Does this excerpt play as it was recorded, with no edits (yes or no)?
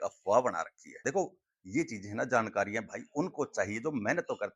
no